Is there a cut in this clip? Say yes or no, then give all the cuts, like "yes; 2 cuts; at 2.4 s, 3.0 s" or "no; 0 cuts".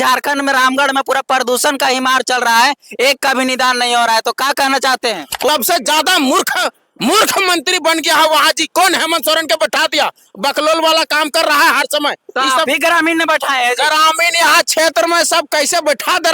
yes; 1 cut; at 5.5 s